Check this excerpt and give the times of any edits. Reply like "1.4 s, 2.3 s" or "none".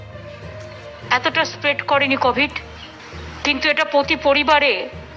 none